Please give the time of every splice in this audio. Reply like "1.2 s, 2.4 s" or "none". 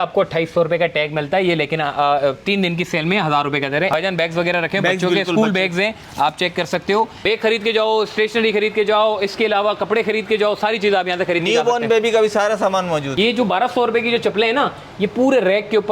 3.9 s, 7.1 s, 13.1 s